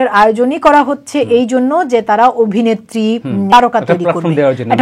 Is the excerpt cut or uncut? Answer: cut